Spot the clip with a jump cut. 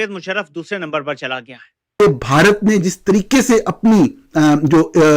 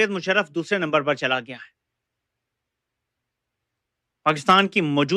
first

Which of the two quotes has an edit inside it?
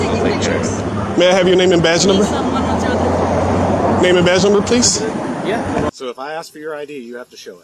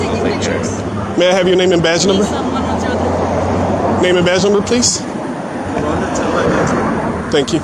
first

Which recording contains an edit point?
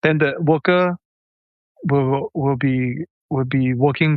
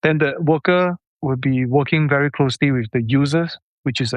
second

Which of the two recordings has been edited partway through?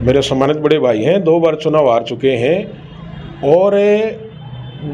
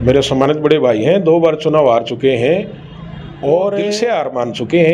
second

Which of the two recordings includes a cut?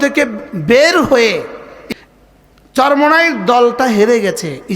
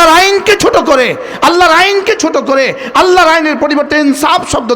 first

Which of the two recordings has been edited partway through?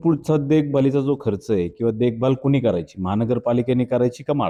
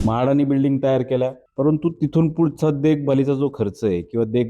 second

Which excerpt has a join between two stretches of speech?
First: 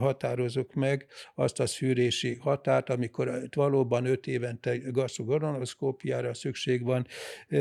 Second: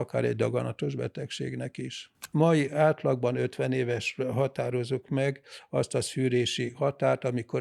second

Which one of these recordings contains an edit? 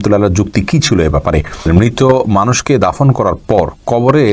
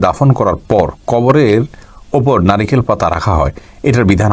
first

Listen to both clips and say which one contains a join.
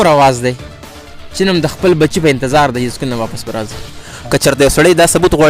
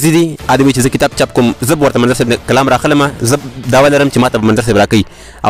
first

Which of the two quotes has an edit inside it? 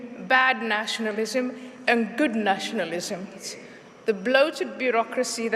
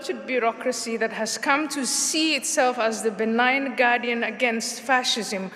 first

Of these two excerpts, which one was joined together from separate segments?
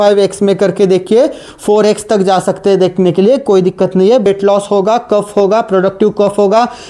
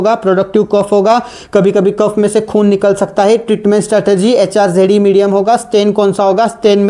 first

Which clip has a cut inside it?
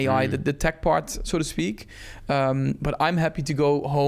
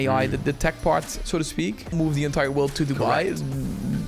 second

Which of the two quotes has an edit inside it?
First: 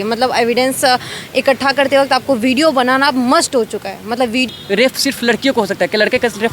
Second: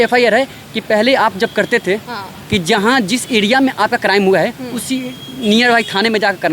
first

